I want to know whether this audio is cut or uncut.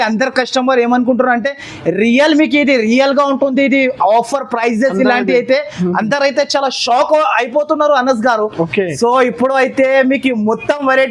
uncut